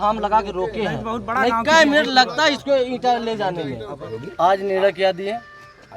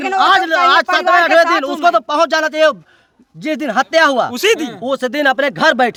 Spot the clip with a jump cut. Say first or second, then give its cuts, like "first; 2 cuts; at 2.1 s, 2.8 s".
first; 1 cut; at 4.2 s